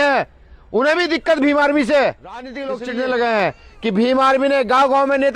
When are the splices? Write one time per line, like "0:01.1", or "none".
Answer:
0:02.6